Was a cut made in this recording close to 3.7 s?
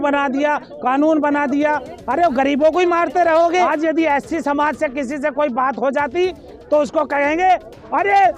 yes; 1 cut; at 3.7 s

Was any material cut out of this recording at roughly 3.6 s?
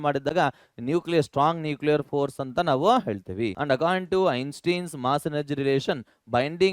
yes; 1 cut; at 3.6 s

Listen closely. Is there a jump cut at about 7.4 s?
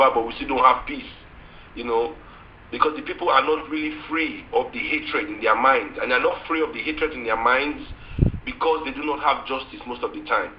yes; 1 cut; at 7.4 s

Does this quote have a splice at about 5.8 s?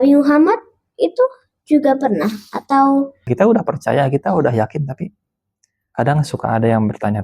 no; 1 cut; at 3.2 s

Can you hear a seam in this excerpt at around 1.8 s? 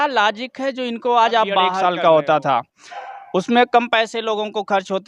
yes; 1 cut; at 1.8 s

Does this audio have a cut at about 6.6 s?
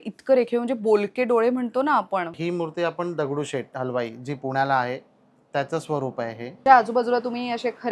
yes; 2 cuts; at 2.4 s, 6.6 s

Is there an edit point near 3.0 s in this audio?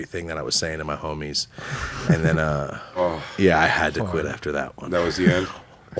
no; 0 cuts

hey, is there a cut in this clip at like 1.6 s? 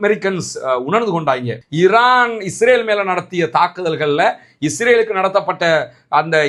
yes; 1 cut; at 1.6 s

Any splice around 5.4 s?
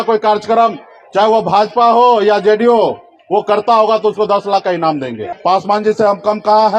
yes; 1 cut; at 5.4 s

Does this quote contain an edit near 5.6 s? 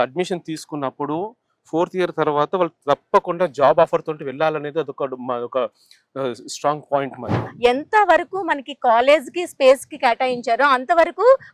no; 1 cut; at 7.4 s

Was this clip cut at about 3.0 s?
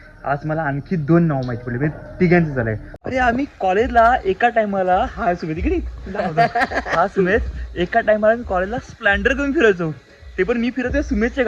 yes; 1 cut; at 3.0 s

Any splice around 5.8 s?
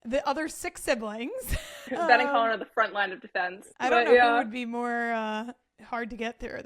no; 2 cuts; at 1.8 s, 3.7 s

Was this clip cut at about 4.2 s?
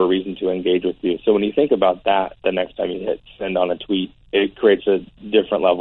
yes; 1 cut; at 4.2 s

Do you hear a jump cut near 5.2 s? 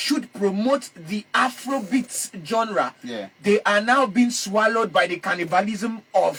no; 0 cuts

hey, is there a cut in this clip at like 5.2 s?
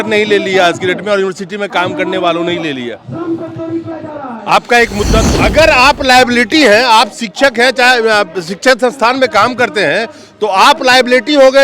yes; 1 cut; at 5.2 s

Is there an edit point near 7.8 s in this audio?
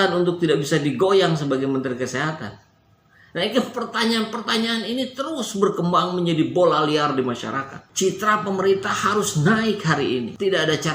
yes; 1 cut; at 7.8 s

